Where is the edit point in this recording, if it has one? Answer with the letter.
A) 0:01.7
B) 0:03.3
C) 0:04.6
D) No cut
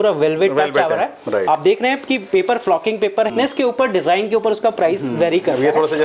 B